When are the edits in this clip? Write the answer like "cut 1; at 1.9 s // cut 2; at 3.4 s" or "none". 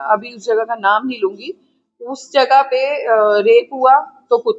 none